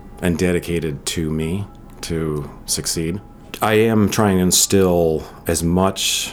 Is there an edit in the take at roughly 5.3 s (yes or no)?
yes